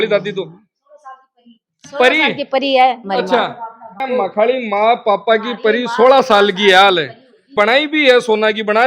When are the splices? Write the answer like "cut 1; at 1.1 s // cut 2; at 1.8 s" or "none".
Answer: cut 1; at 4.0 s // cut 2; at 7.5 s